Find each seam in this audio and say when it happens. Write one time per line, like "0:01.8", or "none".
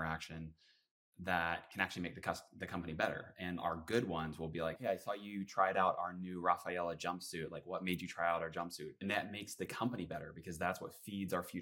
0:04.8
0:09.0

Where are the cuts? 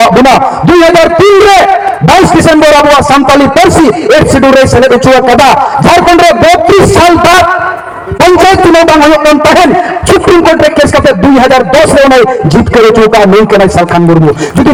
none

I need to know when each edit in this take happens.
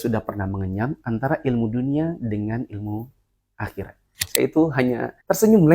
0:04.2

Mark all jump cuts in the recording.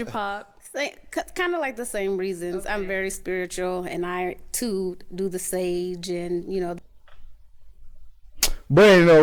none

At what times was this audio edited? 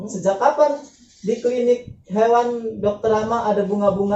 none

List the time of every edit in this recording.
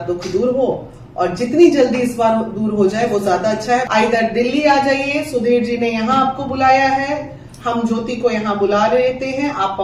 0:03.9

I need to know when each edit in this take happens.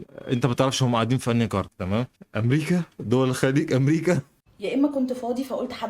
0:04.3

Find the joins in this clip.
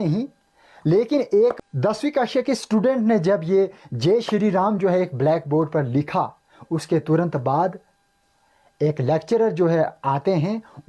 0:01.6

